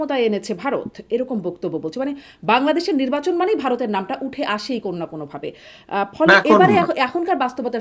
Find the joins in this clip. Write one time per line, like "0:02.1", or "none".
none